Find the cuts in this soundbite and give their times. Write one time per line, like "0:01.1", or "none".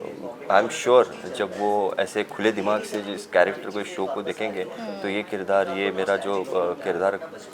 none